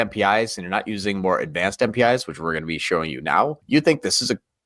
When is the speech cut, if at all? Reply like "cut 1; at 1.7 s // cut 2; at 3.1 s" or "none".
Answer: cut 1; at 3.6 s